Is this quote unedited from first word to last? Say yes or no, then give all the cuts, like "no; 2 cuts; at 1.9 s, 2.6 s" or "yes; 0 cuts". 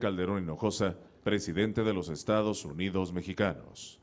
yes; 0 cuts